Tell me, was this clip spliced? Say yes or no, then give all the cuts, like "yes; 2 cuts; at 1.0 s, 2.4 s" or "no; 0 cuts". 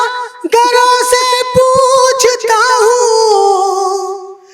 no; 0 cuts